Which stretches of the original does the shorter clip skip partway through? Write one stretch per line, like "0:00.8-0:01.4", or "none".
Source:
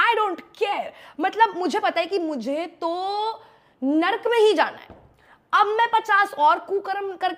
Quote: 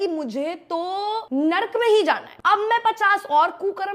0:03.4-0:03.8
0:04.8-0:05.4

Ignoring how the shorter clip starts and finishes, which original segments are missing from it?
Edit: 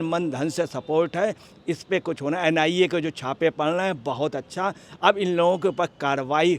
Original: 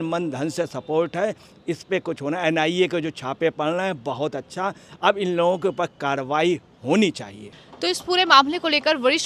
none

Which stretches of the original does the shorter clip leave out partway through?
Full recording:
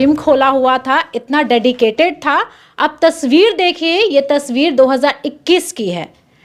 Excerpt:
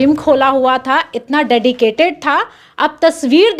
none

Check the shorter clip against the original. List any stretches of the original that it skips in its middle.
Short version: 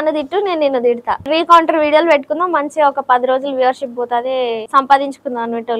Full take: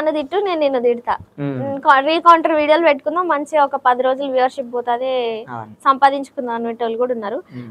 0:01.3-0:02.0
0:05.4-0:05.7

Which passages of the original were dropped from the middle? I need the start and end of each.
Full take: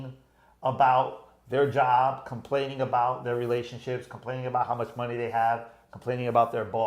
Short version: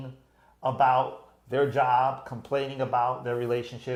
none

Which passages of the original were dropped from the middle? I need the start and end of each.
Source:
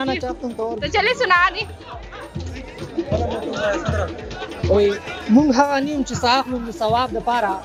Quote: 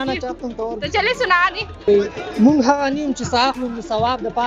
0:01.9-0:04.8

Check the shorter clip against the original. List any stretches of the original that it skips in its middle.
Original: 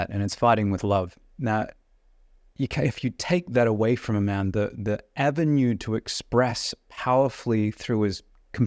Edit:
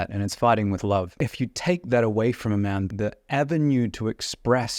0:01.2-0:02.8
0:04.5-0:04.7

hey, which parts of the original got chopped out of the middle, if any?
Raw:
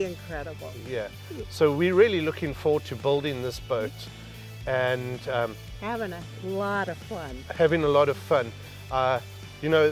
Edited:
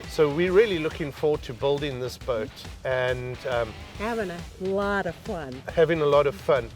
0:04.1-0:04.5

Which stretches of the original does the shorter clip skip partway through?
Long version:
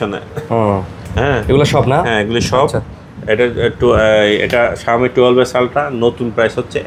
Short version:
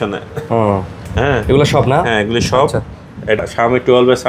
0:03.4-0:04.7

